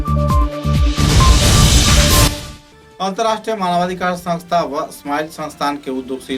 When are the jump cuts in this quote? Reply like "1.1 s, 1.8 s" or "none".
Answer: none